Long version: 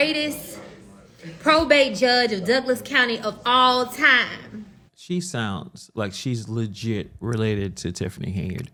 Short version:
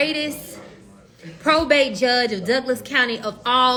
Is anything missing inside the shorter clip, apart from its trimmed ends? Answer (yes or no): no